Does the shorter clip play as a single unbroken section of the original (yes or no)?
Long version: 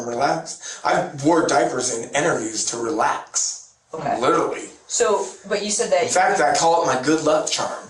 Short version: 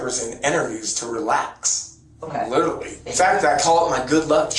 no